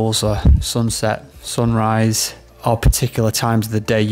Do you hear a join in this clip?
yes; 1 cut; at 2.5 s

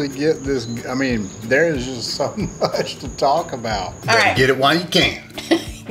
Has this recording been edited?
yes; 1 cut; at 3.9 s

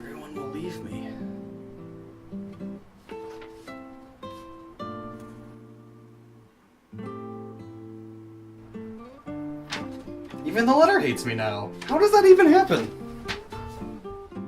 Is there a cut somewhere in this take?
yes; 1 cut; at 2.3 s

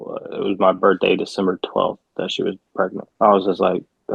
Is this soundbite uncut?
no; 1 cut; at 3.0 s

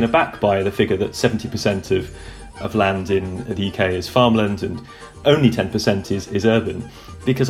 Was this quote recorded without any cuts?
yes; 0 cuts

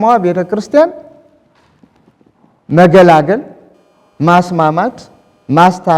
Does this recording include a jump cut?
no; 0 cuts

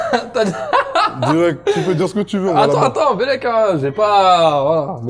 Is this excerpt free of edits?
yes; 0 cuts

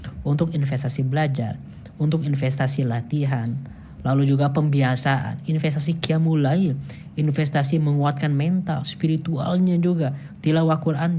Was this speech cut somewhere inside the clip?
yes; 3 cuts; at 3.3 s, 7.2 s, 10.5 s

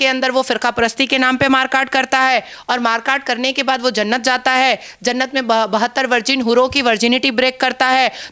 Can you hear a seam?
no; 0 cuts

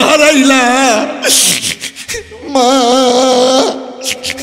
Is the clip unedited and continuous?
no; 1 cut; at 1.5 s

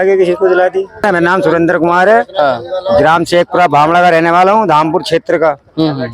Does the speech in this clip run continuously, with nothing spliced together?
no; 1 cut; at 1.0 s

